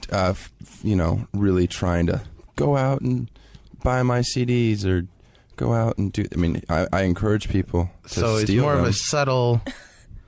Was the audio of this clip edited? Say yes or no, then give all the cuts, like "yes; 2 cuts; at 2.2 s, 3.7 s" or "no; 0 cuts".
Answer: yes; 1 cut; at 1.1 s